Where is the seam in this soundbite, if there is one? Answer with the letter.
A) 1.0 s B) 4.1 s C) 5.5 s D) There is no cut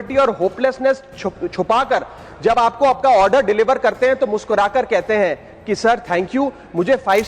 D